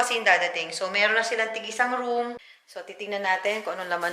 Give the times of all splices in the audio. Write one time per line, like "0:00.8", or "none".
0:02.4